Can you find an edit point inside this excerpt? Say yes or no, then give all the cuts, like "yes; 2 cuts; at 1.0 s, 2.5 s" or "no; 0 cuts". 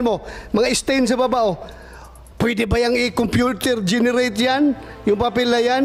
no; 0 cuts